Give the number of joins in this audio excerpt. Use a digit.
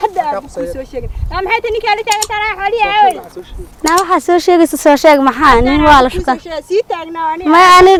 0